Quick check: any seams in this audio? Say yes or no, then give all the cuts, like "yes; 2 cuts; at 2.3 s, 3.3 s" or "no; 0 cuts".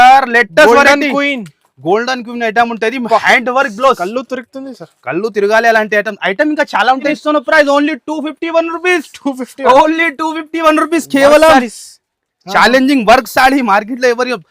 yes; 1 cut; at 7.1 s